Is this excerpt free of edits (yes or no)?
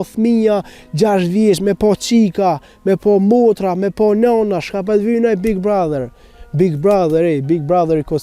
yes